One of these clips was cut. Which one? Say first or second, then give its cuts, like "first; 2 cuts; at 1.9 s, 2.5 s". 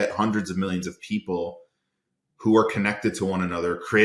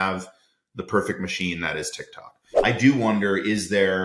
second; 1 cut; at 2.5 s